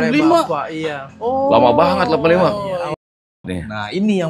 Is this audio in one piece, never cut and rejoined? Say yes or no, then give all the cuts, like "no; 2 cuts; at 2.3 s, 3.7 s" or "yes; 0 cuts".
no; 1 cut; at 3.0 s